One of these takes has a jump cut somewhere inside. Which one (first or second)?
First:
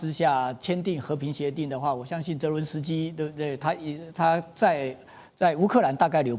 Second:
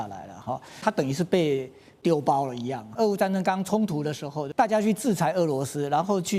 second